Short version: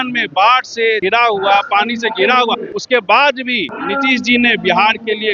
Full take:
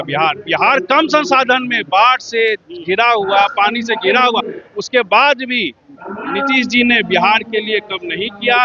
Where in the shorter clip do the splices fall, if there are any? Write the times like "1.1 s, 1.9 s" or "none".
1.0 s, 2.7 s, 3.7 s